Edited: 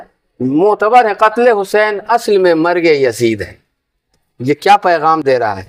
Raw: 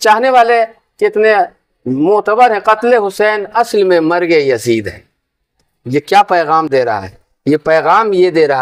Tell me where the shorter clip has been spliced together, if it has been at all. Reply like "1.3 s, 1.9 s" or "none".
none